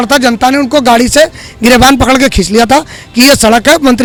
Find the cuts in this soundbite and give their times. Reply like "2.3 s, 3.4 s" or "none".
none